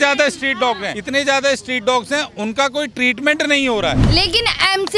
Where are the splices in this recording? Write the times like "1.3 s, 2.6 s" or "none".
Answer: 0.9 s, 4.0 s